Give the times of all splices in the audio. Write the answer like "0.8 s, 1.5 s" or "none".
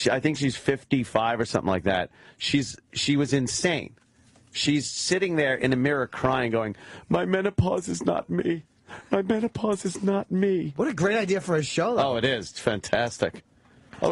none